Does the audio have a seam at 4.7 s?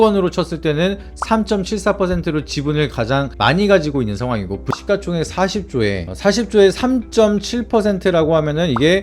yes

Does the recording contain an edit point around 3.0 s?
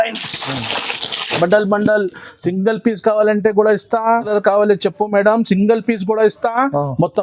no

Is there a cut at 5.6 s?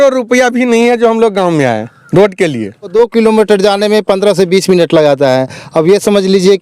no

